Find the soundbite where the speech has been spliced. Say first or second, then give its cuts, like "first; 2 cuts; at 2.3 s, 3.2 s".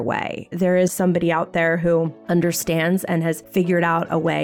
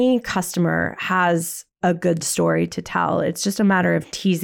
first; 2 cuts; at 0.7 s, 3.4 s